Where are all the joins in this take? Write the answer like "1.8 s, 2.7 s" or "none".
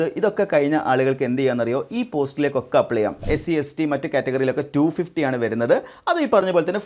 3.3 s

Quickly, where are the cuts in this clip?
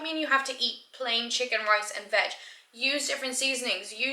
none

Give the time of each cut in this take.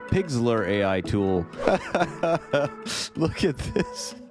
1.5 s

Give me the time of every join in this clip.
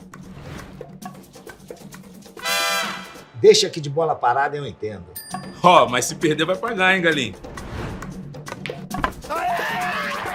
none

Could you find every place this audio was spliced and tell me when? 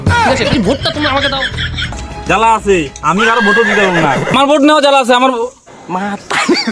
2.0 s

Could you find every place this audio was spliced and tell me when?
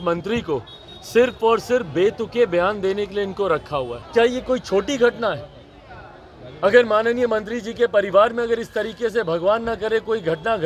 4.0 s

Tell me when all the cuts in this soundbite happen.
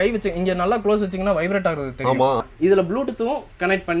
2.4 s

